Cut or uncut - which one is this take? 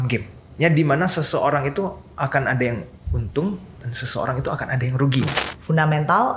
cut